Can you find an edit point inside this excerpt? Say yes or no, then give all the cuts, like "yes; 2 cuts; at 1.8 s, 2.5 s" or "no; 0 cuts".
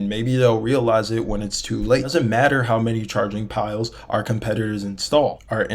yes; 1 cut; at 2.1 s